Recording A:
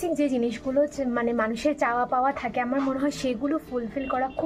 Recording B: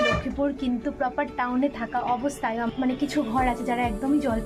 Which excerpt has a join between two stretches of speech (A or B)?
B